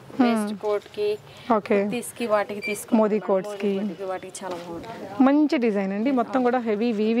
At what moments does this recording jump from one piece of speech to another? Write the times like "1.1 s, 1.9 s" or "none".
none